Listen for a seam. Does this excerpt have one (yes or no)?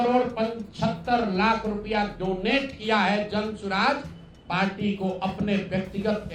no